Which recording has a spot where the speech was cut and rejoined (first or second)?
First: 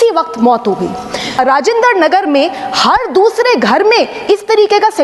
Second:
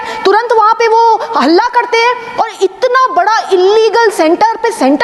first